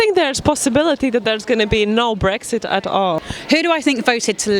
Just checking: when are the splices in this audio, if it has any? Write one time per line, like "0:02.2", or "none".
0:03.3